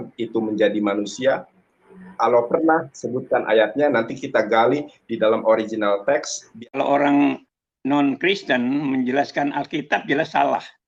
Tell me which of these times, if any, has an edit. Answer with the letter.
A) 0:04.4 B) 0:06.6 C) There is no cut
B